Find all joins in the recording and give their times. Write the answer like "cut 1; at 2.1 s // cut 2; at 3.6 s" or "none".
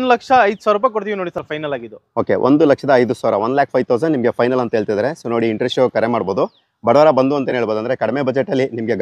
none